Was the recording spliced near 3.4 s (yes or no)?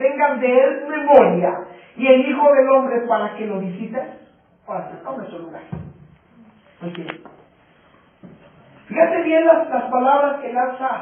yes